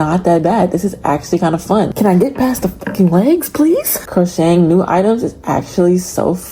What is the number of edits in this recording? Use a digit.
2